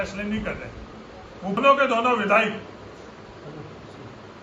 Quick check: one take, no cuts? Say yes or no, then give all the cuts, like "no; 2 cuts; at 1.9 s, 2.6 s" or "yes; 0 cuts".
no; 1 cut; at 1.6 s